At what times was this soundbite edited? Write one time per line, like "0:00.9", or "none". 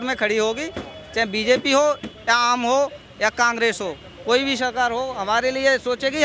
none